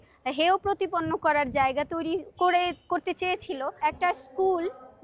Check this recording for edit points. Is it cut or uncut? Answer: cut